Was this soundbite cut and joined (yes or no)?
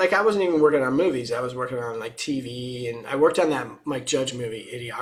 no